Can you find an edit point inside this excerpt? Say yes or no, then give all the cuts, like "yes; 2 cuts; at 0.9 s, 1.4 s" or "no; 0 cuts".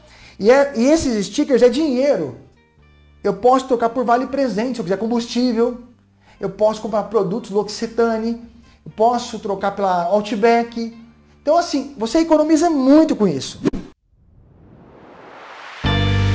yes; 1 cut; at 13.5 s